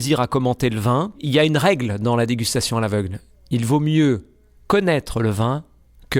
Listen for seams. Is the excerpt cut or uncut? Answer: cut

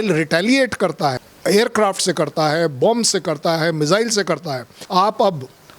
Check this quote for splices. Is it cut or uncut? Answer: cut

